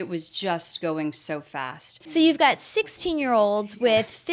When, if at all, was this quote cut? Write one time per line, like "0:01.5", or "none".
0:02.2